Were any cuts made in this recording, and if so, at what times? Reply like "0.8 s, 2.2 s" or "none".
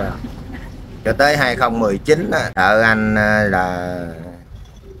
2.6 s